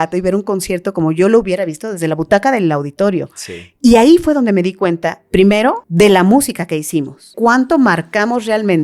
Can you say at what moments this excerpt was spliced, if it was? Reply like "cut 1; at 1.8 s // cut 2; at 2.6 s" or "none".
cut 1; at 5.8 s // cut 2; at 7.3 s